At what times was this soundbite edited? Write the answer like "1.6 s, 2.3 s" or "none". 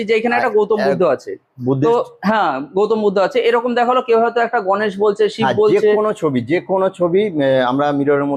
none